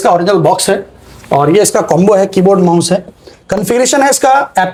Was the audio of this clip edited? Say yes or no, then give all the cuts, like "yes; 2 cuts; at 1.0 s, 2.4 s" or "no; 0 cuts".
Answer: no; 0 cuts